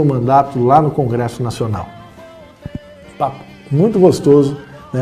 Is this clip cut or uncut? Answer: cut